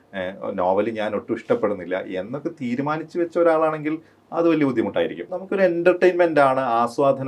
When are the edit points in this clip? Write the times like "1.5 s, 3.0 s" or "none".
5.3 s